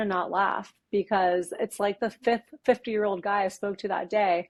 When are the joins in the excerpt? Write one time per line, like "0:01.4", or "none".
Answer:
none